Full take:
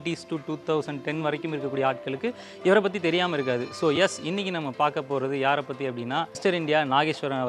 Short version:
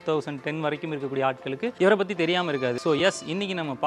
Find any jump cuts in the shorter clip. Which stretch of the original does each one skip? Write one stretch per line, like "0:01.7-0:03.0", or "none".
0:02.3-0:02.6
0:03.6-0:03.8